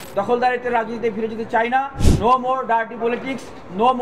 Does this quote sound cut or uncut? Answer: cut